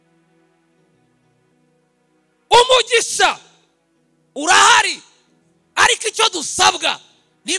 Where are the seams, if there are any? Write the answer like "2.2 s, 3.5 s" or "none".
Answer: 1.5 s